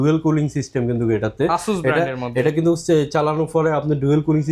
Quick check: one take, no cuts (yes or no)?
yes